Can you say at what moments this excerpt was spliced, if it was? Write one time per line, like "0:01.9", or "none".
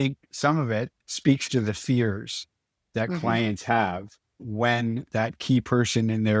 0:01.0